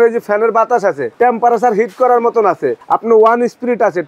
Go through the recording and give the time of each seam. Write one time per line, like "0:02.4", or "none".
0:01.1
0:02.8